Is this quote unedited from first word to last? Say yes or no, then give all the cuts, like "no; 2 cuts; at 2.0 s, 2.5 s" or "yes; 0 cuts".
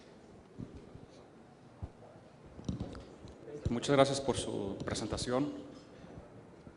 yes; 0 cuts